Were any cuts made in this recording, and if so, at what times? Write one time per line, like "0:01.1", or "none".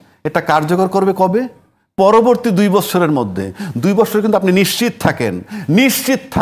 none

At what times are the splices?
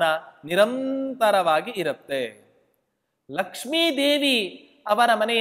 none

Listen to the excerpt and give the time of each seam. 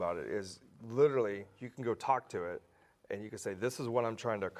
none

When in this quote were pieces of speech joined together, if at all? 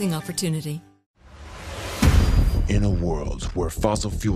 0:01.0

